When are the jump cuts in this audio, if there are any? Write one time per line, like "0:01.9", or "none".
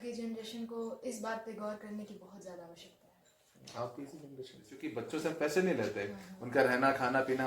0:04.8

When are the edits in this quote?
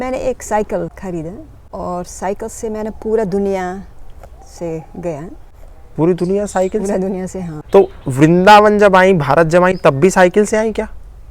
0:01.0
0:07.6

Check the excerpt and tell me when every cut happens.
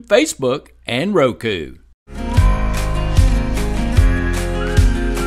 0:02.1

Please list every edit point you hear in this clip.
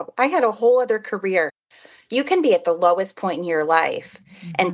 0:01.7

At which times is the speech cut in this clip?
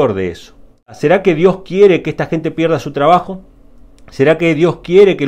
0:01.0

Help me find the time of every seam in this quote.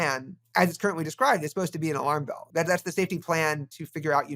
0:02.5

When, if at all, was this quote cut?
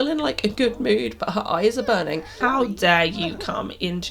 0:02.4

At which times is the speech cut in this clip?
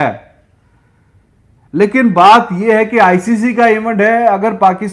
none

